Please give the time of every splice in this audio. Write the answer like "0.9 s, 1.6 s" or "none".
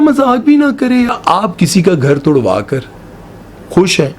1.1 s